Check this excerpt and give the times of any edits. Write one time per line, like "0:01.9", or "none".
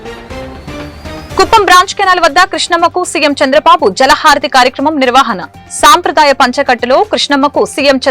0:01.2